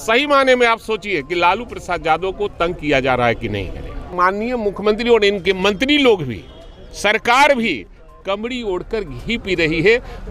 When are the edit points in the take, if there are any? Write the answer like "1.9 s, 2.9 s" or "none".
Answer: 4.1 s